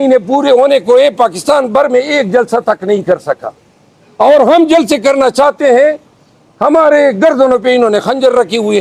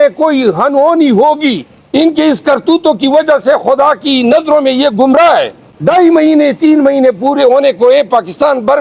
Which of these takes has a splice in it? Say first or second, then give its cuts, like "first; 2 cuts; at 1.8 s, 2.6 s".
second; 2 cuts; at 1.7 s, 5.6 s